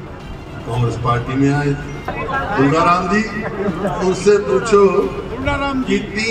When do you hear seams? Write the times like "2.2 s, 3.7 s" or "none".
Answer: 2.1 s